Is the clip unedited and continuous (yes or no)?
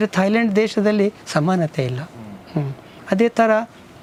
yes